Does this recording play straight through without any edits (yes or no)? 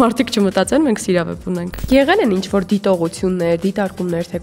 no